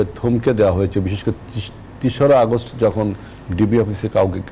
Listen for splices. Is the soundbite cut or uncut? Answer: uncut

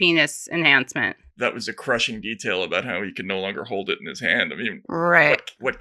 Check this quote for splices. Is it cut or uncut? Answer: cut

